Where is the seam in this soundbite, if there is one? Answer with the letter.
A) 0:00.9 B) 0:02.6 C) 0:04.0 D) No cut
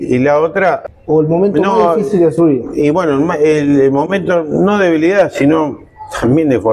A